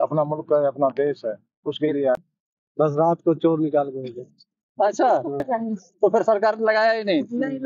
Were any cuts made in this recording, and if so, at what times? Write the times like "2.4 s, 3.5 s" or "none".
2.1 s, 5.5 s